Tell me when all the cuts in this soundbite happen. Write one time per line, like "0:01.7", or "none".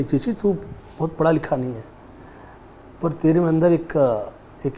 none

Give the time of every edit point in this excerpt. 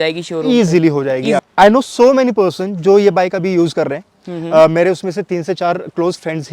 0:01.4

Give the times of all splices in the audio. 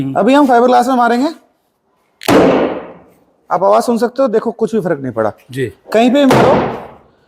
none

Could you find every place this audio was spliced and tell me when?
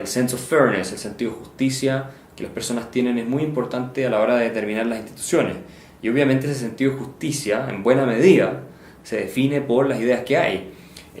0:10.0

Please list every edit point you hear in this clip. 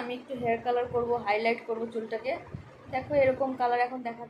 none

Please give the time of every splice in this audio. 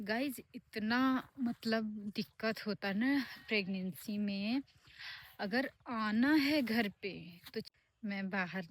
0:07.7

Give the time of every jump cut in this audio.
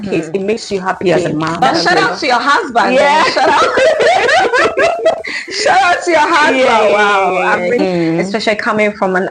0:01.6
0:07.8

